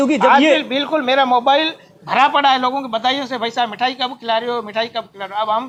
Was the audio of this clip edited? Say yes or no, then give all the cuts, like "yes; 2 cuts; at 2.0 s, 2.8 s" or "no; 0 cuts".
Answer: no; 0 cuts